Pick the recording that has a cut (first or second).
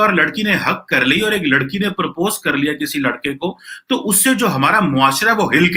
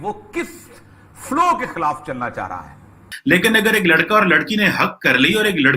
second